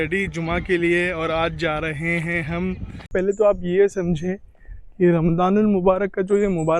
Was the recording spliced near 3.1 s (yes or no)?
yes